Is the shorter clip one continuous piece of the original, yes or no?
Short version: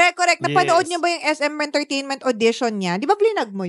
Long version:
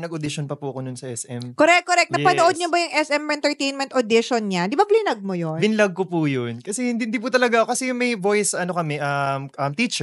yes